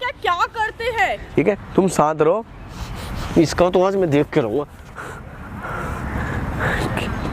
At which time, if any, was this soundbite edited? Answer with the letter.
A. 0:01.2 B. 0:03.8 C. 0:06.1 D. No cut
A